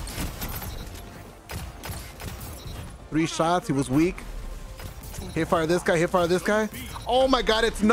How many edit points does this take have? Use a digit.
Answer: 1